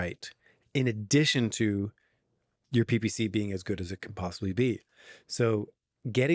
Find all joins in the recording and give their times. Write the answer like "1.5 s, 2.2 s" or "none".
none